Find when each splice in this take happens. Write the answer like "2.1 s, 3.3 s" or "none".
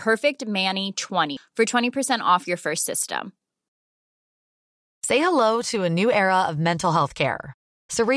1.3 s